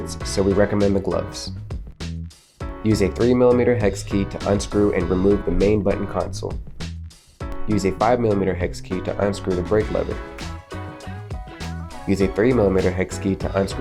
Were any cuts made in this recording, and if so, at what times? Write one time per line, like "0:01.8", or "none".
none